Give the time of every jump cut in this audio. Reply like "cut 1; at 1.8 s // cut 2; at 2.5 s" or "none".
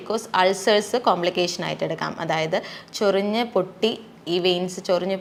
none